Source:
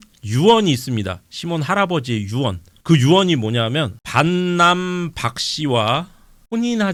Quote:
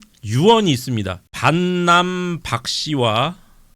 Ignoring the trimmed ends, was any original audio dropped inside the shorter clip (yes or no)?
yes